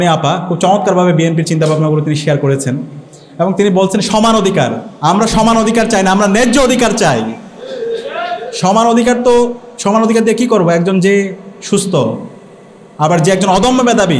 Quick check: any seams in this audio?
yes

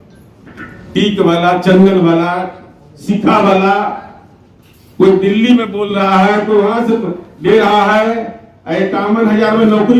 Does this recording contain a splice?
no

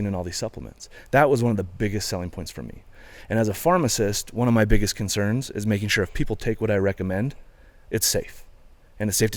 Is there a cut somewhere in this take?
no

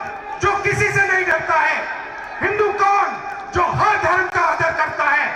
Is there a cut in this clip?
no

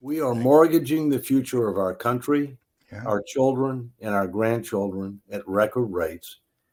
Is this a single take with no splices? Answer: yes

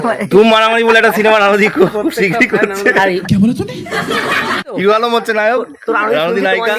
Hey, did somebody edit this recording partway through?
yes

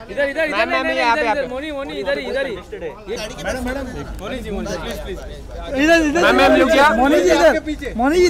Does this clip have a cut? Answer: yes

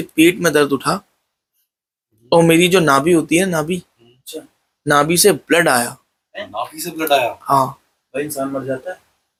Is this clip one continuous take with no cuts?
yes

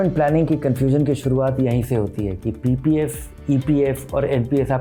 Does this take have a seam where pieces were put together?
no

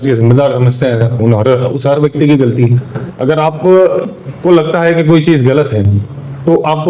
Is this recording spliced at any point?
no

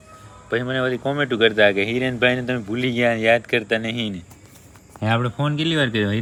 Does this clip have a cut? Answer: no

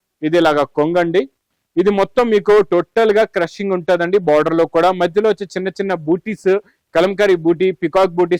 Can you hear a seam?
no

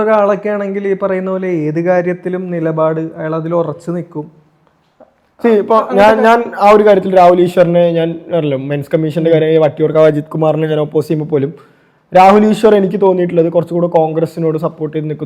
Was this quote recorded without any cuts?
yes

